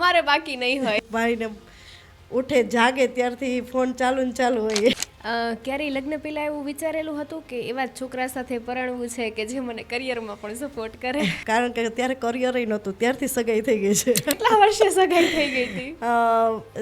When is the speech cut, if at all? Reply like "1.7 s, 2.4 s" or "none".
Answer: 1.0 s, 5.0 s, 11.4 s, 14.4 s